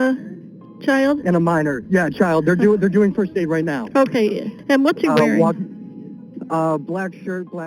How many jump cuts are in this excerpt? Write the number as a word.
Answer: one